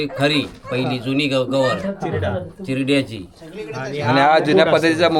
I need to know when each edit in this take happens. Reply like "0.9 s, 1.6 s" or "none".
none